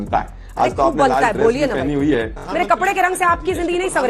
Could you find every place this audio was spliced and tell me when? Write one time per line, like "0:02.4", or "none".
0:02.4